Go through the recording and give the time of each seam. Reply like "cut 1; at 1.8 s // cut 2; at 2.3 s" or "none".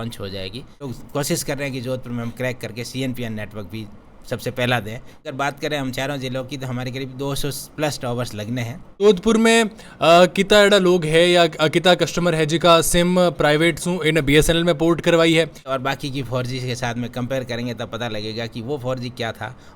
cut 1; at 1.0 s // cut 2; at 5.3 s // cut 3; at 9.0 s // cut 4; at 15.7 s